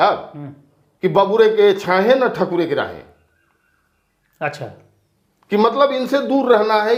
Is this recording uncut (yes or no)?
yes